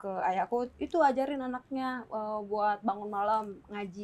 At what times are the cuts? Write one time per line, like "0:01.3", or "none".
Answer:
none